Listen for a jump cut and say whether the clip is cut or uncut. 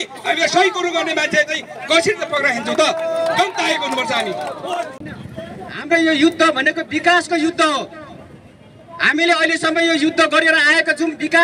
cut